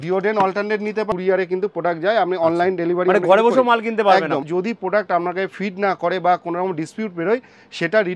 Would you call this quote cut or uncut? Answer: cut